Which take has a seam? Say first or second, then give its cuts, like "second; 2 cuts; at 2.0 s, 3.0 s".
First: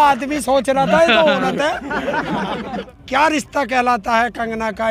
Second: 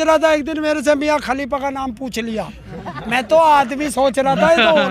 first; 1 cut; at 2.7 s